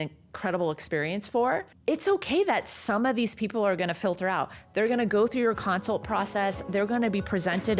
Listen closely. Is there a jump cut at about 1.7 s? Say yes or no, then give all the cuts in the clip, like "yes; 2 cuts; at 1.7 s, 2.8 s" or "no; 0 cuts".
yes; 1 cut; at 1.7 s